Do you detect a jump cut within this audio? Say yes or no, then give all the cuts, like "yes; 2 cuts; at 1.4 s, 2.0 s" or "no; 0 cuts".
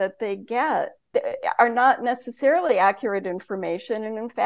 no; 0 cuts